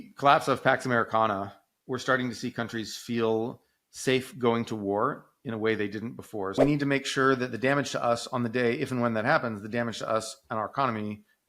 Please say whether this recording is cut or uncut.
cut